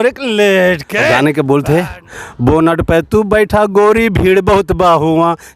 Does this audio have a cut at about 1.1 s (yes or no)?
yes